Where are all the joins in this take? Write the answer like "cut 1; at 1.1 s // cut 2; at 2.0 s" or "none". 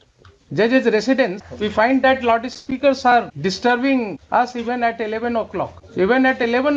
cut 1; at 1.4 s // cut 2; at 3.3 s // cut 3; at 4.2 s // cut 4; at 5.8 s